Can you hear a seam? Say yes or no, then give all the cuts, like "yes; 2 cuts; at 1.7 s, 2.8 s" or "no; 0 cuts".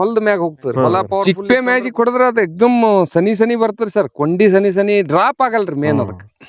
yes; 1 cut; at 1.2 s